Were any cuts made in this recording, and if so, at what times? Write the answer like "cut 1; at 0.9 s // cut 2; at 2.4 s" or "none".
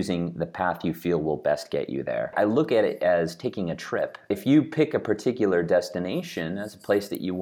cut 1; at 2.3 s // cut 2; at 4.3 s